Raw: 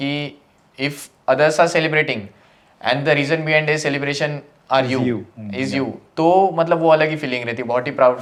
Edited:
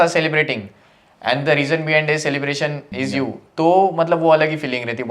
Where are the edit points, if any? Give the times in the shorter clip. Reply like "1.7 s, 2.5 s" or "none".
2.8 s